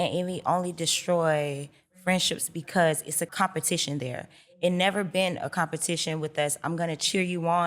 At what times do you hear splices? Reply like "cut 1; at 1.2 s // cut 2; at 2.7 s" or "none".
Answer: cut 1; at 3.3 s